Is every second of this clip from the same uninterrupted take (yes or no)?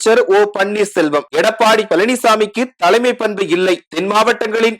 no